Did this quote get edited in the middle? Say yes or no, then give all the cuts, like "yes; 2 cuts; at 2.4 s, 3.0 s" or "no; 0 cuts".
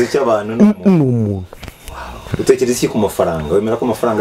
yes; 1 cut; at 2.3 s